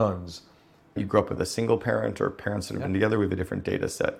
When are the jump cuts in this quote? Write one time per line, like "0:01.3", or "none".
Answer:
0:01.0